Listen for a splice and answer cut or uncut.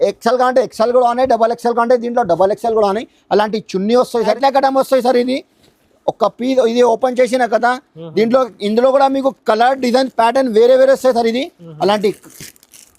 cut